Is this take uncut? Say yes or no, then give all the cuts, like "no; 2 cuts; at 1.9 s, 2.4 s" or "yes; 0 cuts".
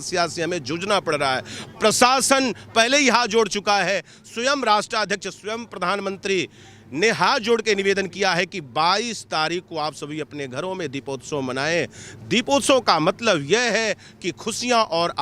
yes; 0 cuts